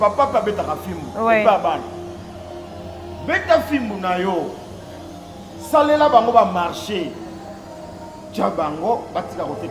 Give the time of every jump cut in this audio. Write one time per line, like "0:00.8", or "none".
none